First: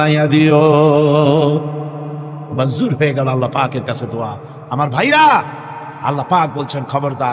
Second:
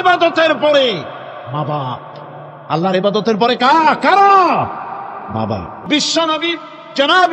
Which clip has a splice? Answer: second; 1 cut; at 5.7 s

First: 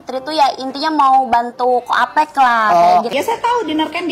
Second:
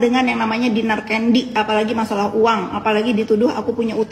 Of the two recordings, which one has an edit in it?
first; 1 cut; at 3.1 s

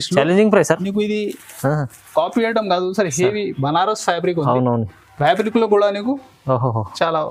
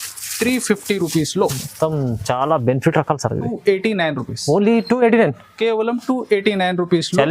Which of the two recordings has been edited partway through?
second; 1 cut; at 3.5 s

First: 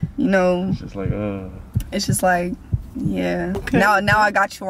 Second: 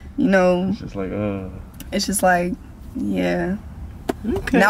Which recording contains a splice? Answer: first; 1 cut; at 3.6 s

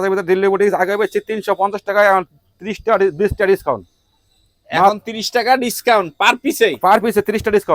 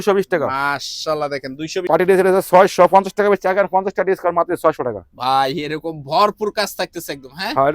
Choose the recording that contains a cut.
second; 1 cut; at 1.9 s

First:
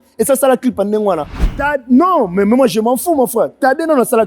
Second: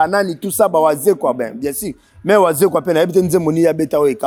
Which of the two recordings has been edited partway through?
first; 1 cut; at 1.5 s

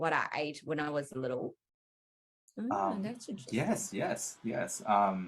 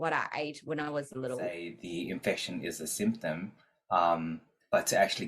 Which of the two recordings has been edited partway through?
second; 1 cut; at 1.7 s

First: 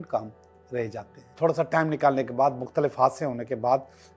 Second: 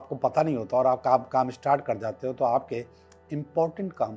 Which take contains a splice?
first; 1 cut; at 1.3 s

